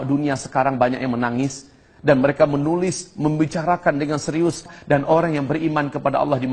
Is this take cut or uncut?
cut